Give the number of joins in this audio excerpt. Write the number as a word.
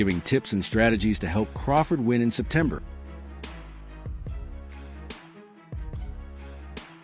one